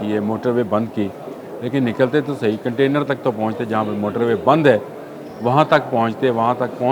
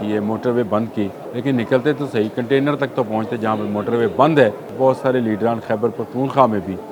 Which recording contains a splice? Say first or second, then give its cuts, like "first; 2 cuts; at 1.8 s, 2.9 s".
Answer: second; 2 cuts; at 1.2 s, 4.6 s